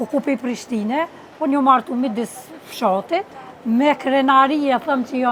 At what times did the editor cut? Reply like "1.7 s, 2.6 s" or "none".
none